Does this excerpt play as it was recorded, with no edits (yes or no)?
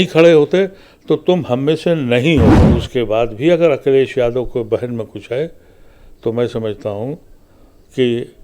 no